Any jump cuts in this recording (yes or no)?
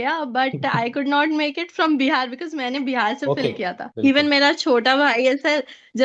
yes